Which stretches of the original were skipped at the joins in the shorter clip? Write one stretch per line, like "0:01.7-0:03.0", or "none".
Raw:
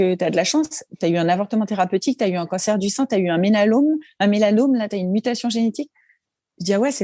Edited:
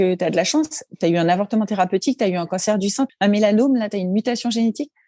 0:03.1-0:04.1